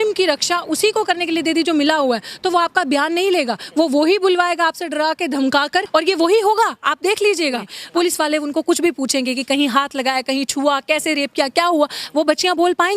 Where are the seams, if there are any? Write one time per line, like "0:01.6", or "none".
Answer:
0:05.9
0:07.8